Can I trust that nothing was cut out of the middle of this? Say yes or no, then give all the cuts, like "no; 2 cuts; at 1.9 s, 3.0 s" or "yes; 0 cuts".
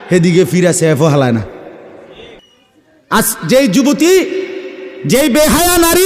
no; 1 cut; at 2.4 s